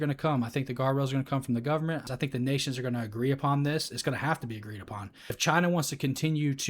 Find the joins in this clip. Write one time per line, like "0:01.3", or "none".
0:02.1
0:05.4